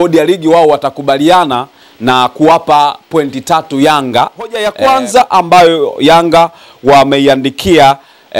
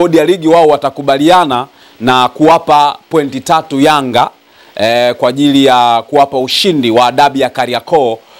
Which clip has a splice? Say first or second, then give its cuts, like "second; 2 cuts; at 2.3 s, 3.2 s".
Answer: first; 1 cut; at 4.7 s